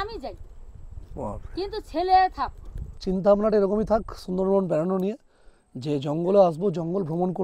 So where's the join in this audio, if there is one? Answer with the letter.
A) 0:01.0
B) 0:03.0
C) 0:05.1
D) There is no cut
B